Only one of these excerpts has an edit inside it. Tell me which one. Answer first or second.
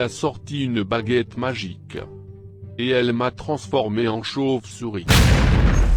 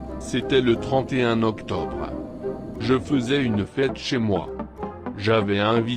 first